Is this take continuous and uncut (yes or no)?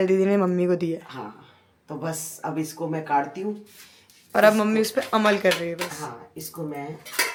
yes